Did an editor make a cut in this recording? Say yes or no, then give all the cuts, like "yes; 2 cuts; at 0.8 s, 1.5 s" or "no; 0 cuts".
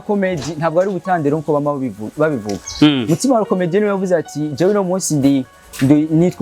no; 0 cuts